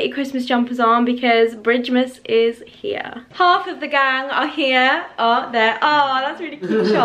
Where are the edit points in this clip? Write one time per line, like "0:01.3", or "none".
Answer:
0:03.2

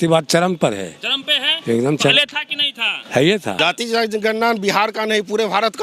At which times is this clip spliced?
0:03.6

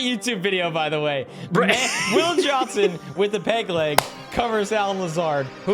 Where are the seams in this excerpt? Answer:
none

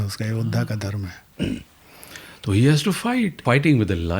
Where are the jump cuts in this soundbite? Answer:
0:01.2
0:03.4

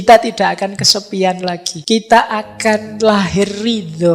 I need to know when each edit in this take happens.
0:01.7

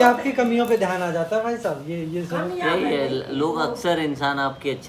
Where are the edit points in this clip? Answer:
none

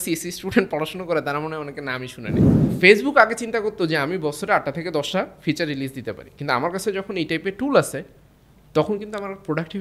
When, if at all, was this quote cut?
0:02.7

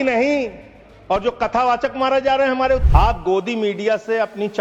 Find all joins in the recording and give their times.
0:02.8

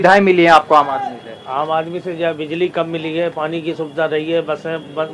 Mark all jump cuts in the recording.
none

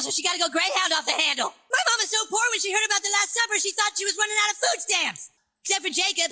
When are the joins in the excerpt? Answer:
0:01.6
0:05.4

